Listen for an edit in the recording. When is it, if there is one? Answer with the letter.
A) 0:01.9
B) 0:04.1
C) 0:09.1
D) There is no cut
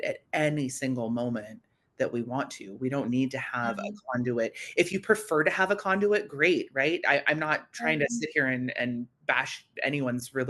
C